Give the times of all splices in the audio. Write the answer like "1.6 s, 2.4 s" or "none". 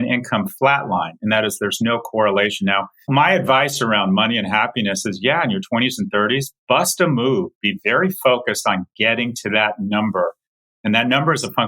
3.1 s